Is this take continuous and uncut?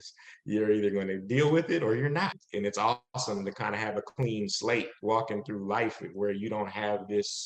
no; 1 cut; at 2.4 s

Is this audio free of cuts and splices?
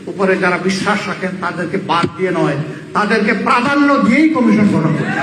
no; 1 cut; at 1.1 s

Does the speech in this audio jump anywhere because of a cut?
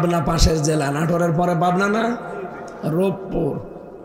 no; 0 cuts

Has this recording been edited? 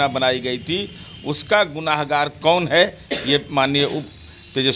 no; 0 cuts

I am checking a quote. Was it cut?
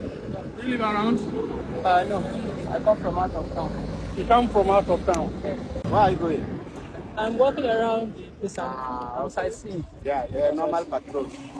no; 0 cuts

